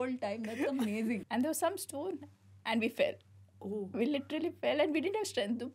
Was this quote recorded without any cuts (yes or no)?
no